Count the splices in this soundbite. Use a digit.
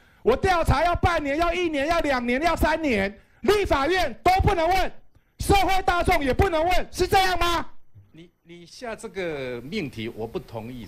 0